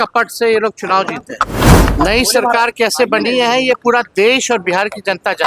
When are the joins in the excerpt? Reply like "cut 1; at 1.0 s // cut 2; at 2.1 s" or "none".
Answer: cut 1; at 1.6 s